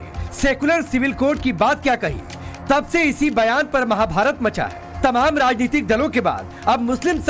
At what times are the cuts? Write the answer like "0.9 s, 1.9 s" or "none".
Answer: none